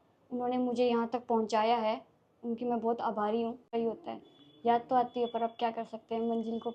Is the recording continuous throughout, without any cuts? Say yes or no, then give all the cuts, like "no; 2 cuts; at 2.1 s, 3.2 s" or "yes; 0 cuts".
no; 1 cut; at 3.7 s